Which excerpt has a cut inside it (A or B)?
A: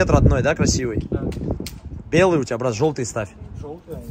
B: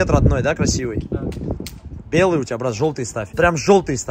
B